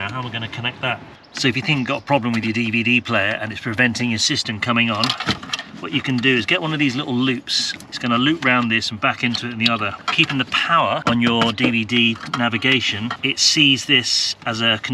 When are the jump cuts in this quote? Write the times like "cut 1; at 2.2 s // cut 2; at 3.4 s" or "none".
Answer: cut 1; at 1.3 s // cut 2; at 7.8 s // cut 3; at 10.0 s // cut 4; at 11.0 s // cut 5; at 13.2 s